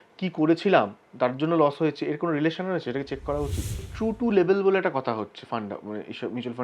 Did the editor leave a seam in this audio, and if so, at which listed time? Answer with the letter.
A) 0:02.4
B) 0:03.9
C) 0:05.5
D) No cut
B